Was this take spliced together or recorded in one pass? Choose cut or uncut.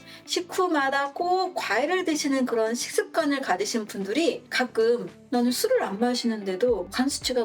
uncut